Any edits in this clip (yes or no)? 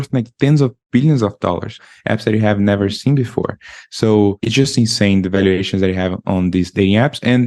yes